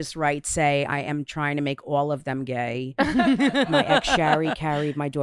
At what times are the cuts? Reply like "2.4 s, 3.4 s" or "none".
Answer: 3.7 s